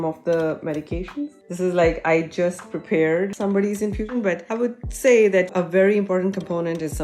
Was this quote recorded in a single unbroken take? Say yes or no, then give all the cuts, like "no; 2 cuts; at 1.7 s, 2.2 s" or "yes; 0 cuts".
no; 1 cut; at 4.0 s